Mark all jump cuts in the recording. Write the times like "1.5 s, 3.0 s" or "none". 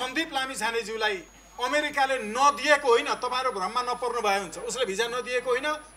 1.4 s